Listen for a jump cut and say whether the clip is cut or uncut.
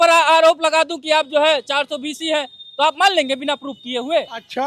uncut